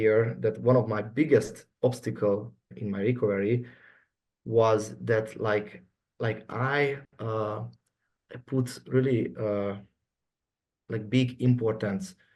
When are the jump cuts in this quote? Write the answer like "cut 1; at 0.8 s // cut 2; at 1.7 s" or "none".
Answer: cut 1; at 2.7 s